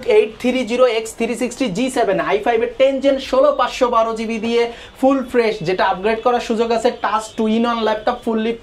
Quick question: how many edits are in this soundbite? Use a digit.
0